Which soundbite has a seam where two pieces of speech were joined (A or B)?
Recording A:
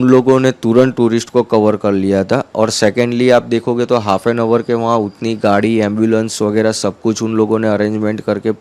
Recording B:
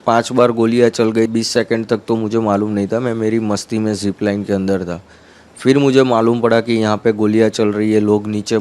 B